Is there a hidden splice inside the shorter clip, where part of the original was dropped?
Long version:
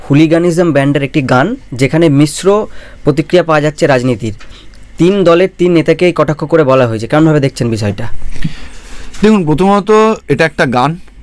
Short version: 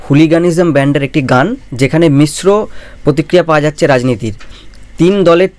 no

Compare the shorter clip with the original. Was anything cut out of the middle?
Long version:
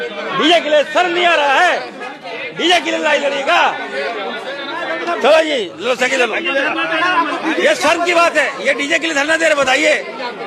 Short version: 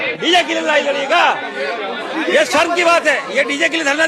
yes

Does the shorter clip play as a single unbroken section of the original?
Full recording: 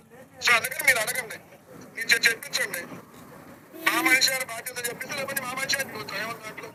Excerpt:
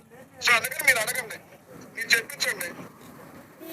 no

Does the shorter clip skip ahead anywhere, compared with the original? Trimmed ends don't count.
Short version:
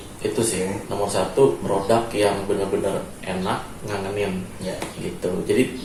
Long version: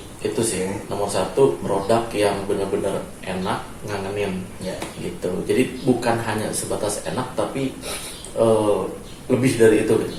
no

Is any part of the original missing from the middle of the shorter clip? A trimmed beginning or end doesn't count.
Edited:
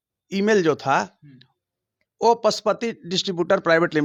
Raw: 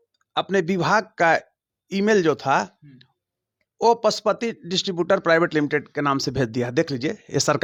no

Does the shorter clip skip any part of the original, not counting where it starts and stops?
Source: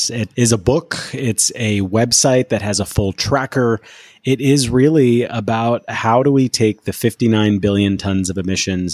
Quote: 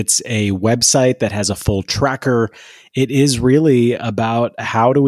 no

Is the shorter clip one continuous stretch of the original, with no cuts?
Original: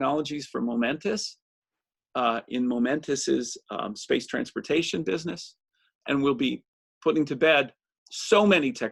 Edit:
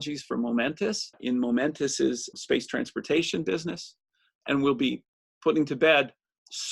no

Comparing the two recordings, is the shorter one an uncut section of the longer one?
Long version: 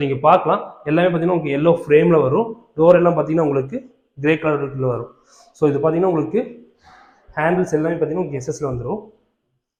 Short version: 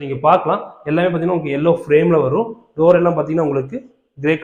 yes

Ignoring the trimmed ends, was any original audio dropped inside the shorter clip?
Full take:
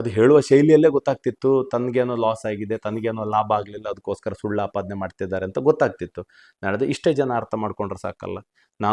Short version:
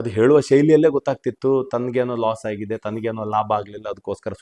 no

